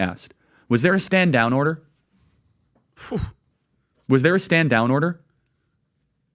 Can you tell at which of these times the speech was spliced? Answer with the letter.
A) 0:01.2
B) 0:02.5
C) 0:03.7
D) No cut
D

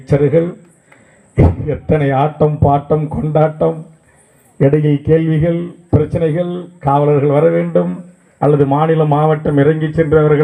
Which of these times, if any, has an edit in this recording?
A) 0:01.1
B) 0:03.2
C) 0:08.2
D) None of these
D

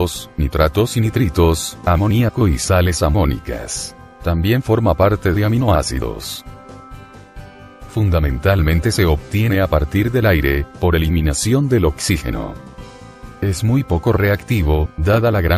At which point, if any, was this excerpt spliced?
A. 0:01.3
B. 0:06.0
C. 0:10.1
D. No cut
C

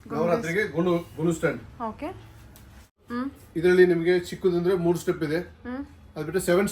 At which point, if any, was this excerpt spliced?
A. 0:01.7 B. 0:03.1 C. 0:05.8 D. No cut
B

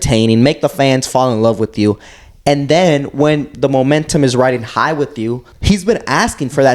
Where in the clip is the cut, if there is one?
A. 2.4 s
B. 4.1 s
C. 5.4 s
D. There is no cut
C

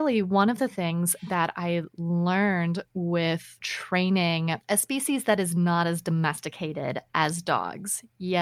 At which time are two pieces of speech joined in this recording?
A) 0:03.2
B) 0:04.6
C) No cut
C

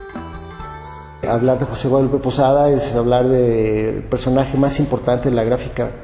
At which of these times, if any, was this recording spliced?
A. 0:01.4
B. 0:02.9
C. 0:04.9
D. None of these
D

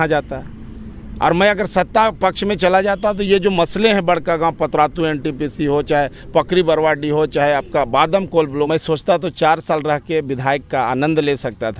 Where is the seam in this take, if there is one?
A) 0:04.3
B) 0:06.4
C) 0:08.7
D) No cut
C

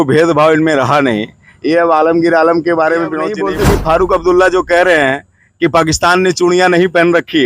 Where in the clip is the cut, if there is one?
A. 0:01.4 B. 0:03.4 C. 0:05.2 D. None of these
B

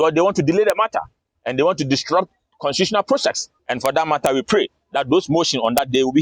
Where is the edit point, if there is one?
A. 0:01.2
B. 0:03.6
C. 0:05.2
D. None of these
B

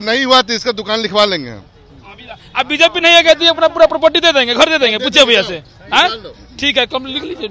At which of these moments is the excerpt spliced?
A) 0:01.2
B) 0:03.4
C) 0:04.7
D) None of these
D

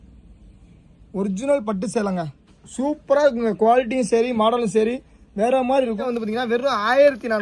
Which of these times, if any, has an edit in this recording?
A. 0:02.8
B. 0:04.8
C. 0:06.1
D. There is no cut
C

